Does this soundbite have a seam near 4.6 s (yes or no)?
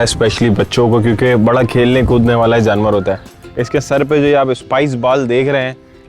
no